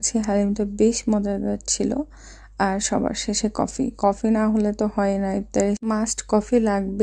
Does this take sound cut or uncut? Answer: cut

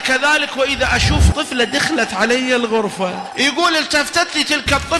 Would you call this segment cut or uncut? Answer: cut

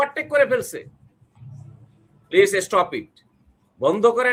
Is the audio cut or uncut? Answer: uncut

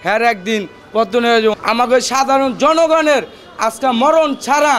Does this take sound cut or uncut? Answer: cut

